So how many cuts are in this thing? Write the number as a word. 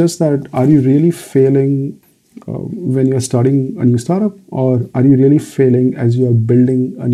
one